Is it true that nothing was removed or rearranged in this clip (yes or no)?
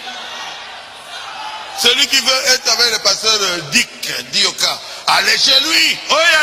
yes